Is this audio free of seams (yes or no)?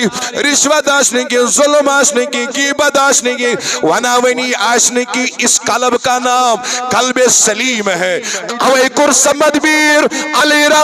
no